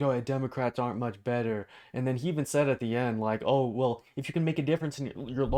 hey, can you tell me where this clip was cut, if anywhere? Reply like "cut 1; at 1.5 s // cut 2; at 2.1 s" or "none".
none